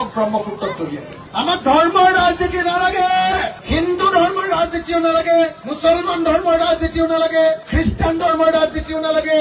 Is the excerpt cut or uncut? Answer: uncut